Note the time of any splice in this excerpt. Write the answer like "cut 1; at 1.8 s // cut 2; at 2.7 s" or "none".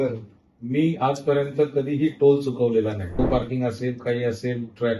cut 1; at 3.2 s